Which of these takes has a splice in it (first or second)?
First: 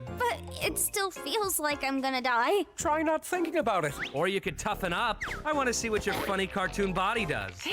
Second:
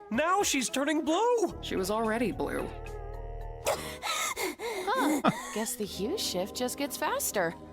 first